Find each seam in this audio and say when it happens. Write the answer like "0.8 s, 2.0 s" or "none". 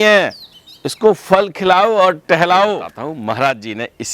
2.9 s